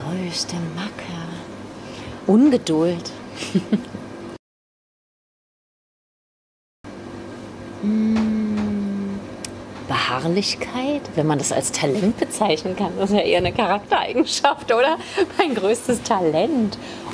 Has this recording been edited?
no; 0 cuts

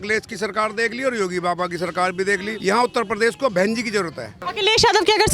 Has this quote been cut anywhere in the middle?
yes; 2 cuts; at 2.5 s, 4.4 s

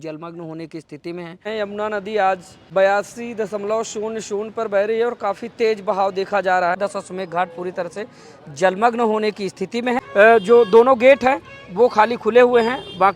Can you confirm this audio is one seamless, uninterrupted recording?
no; 4 cuts; at 1.5 s, 2.5 s, 6.8 s, 10.0 s

